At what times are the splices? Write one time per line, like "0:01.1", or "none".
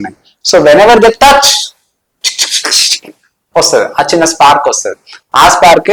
none